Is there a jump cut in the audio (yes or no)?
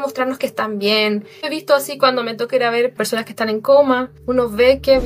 yes